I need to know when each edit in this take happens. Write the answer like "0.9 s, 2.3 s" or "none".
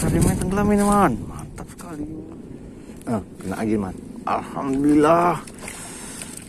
2.1 s